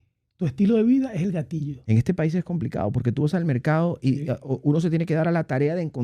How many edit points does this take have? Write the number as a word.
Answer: one